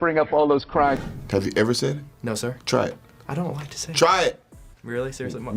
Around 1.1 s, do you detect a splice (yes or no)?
yes